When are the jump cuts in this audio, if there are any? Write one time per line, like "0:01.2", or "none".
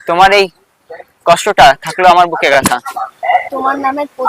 0:02.6